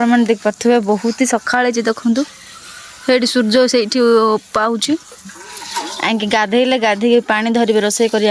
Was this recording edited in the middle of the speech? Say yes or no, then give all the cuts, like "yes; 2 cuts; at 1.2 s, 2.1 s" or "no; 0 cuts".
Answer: no; 0 cuts